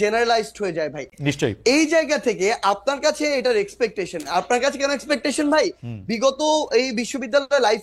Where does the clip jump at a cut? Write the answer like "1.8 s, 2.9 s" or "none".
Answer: none

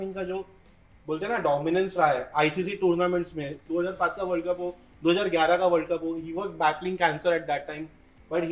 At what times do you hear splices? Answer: none

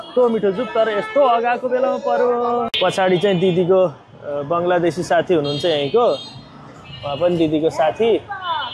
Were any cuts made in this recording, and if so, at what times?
2.7 s

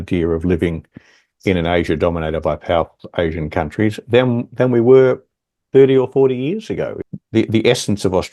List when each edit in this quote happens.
7.0 s

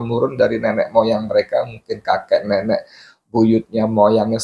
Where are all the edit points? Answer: none

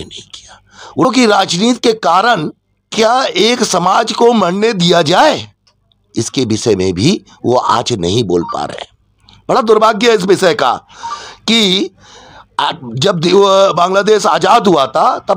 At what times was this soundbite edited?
1.0 s

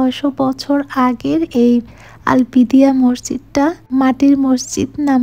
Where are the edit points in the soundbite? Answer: 3.8 s

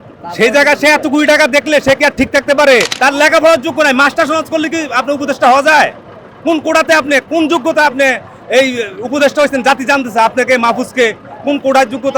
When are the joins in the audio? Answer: 2.9 s

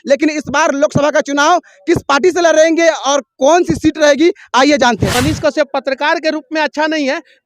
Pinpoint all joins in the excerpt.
5.1 s

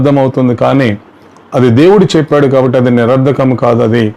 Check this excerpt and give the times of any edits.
none

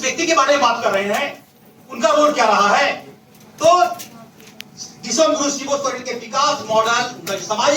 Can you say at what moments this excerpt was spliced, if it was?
none

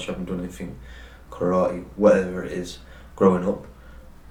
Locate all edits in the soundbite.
none

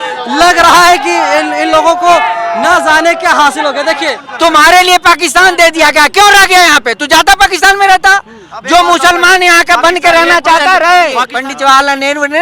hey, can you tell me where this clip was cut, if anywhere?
4.2 s, 11.3 s

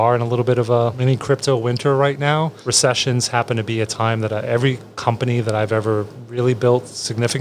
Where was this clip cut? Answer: 1.0 s, 2.6 s

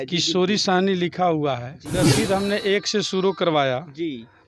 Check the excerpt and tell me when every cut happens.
2.0 s

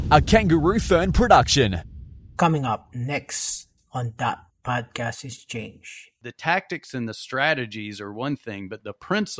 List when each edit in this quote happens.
6.1 s

